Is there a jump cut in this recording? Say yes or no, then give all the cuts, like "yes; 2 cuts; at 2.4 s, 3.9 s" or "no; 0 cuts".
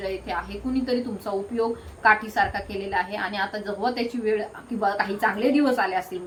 no; 0 cuts